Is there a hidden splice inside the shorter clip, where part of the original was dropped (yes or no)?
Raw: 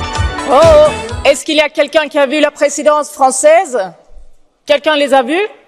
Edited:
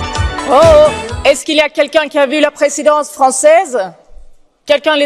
no